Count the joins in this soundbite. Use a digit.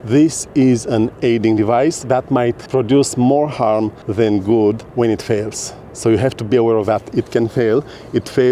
3